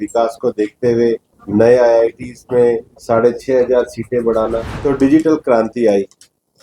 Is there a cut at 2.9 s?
yes; 3 cuts; at 1.3 s, 2.9 s, 4.7 s

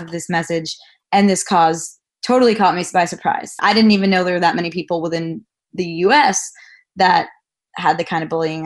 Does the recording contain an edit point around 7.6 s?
yes; 2 cuts; at 3.6 s, 7.6 s

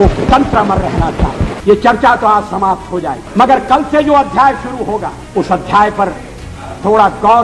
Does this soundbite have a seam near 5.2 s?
yes; 3 cuts; at 1.5 s, 3.2 s, 5.2 s

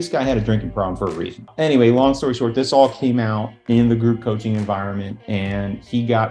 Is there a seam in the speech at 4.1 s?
no; 1 cut; at 1.5 s

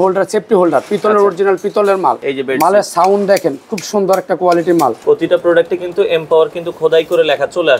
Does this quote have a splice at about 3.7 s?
no; 2 cuts; at 2.2 s, 5.0 s

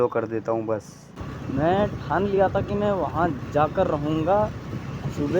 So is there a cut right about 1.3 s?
yes; 1 cut; at 1.3 s

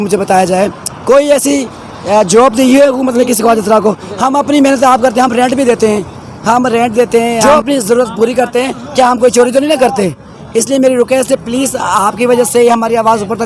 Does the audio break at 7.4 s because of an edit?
yes; 1 cut; at 7.4 s

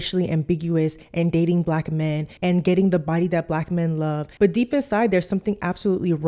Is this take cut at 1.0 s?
no; 2 cuts; at 2.3 s, 4.3 s

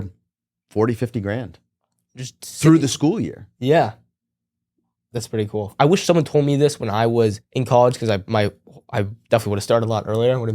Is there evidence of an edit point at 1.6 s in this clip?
no; 2 cuts; at 5.7 s, 7.5 s

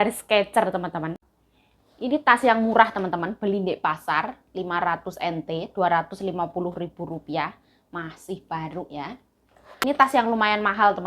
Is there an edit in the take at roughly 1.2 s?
yes; 2 cuts; at 1.2 s, 10.0 s

